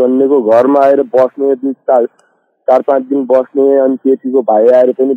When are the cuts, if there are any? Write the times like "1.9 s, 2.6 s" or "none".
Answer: none